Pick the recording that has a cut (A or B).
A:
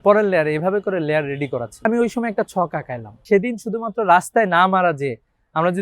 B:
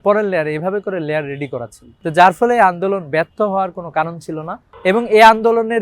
A